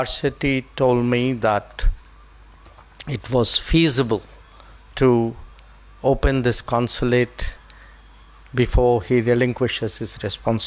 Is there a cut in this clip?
no; 0 cuts

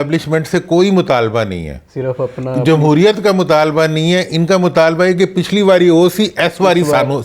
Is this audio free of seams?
yes; 0 cuts

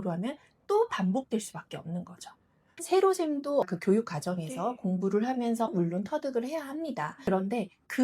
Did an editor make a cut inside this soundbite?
yes; 2 cuts; at 2.7 s, 7.1 s

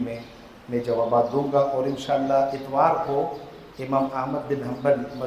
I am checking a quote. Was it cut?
no; 0 cuts

